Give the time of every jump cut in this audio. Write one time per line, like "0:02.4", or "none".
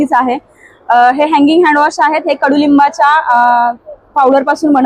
none